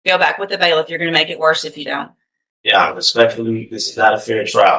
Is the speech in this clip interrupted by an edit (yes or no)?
no